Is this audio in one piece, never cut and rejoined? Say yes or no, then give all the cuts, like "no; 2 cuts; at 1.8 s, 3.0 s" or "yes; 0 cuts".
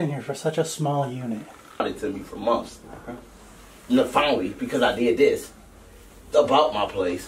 no; 1 cut; at 1.6 s